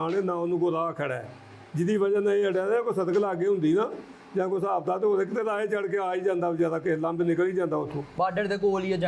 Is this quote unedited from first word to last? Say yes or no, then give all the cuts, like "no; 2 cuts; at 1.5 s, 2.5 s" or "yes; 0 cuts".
no; 1 cut; at 8.1 s